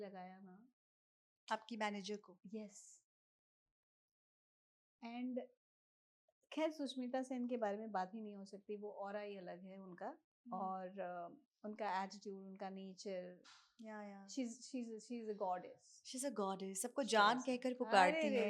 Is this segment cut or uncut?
uncut